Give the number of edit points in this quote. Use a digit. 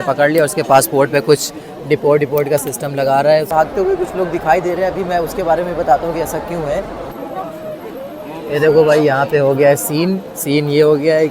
2